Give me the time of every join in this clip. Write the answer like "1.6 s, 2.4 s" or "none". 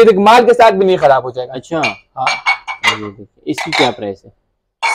none